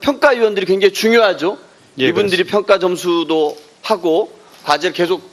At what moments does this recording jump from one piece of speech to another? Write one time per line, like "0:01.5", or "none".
0:01.9

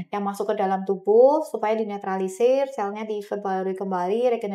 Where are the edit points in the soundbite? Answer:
none

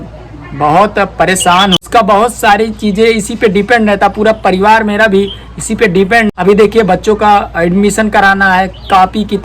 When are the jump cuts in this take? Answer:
0:01.8
0:06.3

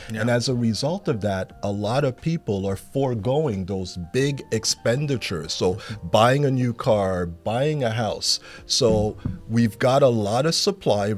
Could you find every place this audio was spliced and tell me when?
0:07.3

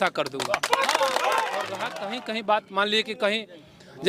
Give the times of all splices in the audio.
0:01.8

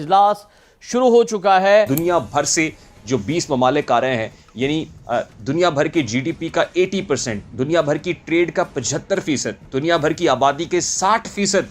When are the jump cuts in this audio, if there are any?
0:01.9

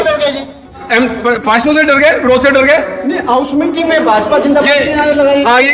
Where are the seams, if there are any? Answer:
none

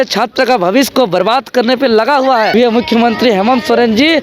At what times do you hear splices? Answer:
0:02.5

